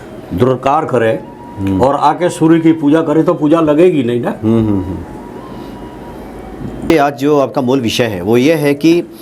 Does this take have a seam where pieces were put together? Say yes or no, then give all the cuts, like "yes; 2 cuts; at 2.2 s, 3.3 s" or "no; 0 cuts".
yes; 1 cut; at 6.9 s